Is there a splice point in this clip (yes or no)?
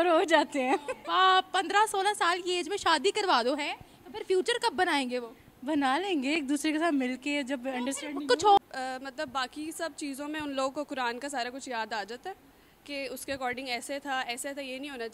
yes